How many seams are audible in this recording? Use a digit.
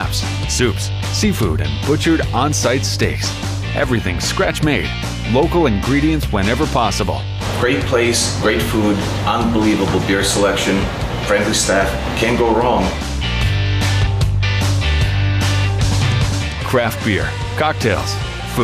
0